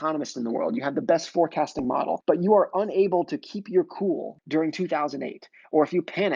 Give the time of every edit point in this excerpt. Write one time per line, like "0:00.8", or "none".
0:02.2
0:04.3